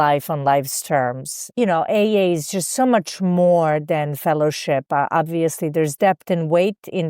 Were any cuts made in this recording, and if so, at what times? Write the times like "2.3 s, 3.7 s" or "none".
1.5 s